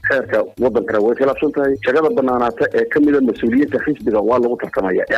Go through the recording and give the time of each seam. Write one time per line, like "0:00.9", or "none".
none